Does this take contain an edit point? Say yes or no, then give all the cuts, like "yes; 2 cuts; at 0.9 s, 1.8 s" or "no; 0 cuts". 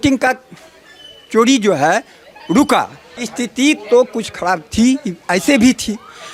yes; 1 cut; at 3.0 s